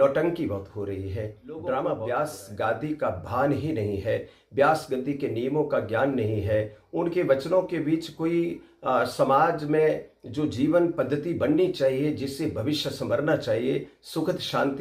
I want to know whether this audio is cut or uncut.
cut